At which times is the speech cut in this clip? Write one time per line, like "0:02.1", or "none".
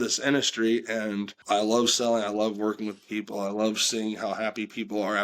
0:01.3